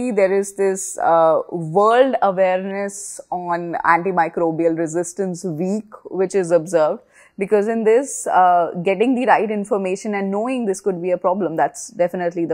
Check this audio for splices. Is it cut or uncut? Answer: uncut